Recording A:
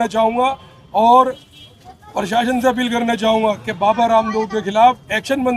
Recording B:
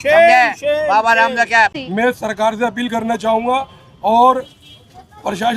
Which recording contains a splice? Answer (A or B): B